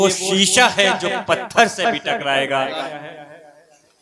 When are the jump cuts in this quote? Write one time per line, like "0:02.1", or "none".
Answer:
0:02.9